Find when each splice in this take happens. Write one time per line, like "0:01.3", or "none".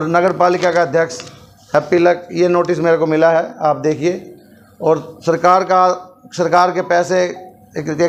none